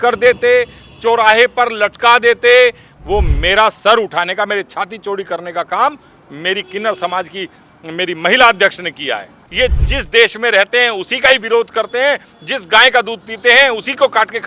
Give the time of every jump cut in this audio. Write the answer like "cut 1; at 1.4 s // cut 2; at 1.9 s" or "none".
cut 1; at 2.9 s // cut 2; at 9.4 s